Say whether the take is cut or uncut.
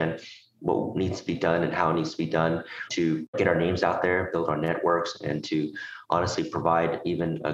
cut